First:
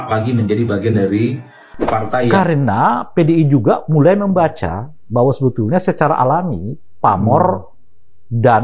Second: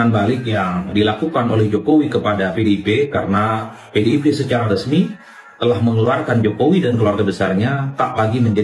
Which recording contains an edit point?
first; 1 cut; at 2.3 s

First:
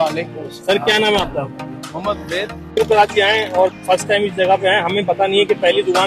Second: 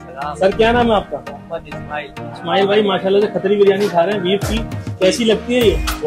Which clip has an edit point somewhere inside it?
first; 1 cut; at 2.8 s

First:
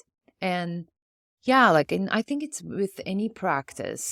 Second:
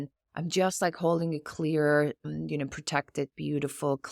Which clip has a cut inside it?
second; 1 cut; at 2.2 s

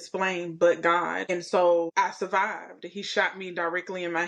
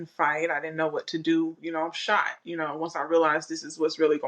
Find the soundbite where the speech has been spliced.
first; 2 cuts; at 1.2 s, 1.9 s

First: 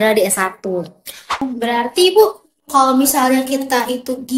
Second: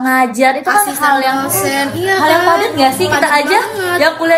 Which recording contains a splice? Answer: first; 1 cut; at 1.4 s

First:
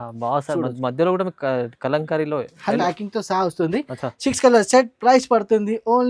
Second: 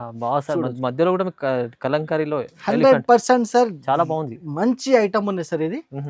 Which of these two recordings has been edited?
first; 1 cut; at 2.8 s

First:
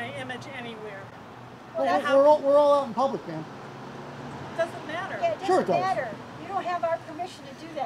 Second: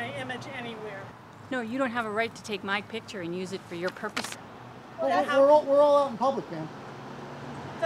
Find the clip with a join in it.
second; 2 cuts; at 1.2 s, 4.4 s

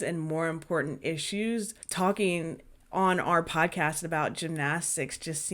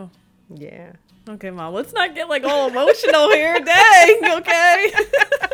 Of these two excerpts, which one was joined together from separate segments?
first; 1 cut; at 1.8 s

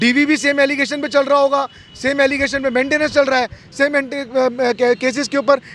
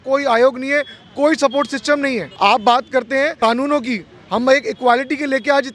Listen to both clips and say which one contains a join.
second; 2 cuts; at 2.3 s, 3.3 s

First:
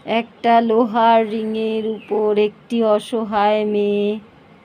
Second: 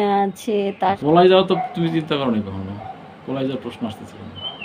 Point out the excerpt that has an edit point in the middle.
second; 1 cut; at 1.0 s

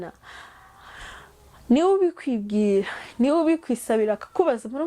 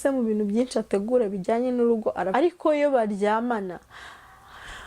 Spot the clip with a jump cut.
second; 1 cut; at 2.2 s

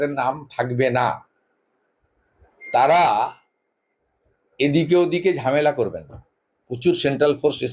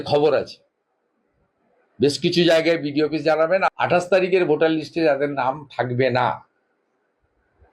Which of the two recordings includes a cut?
second; 1 cut; at 3.7 s

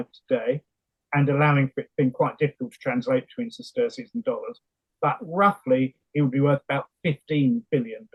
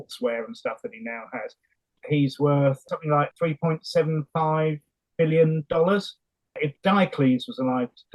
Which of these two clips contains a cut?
second; 3 cuts; at 2.0 s, 2.9 s, 6.6 s

